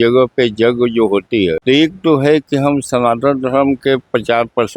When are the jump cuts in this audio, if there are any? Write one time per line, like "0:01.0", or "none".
0:01.6